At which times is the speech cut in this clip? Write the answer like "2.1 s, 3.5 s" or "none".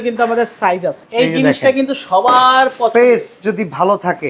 1.0 s